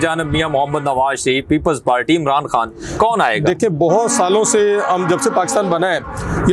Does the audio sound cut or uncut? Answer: uncut